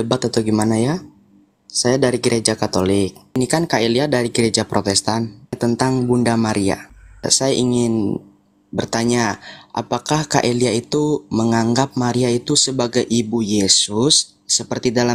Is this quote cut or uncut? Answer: cut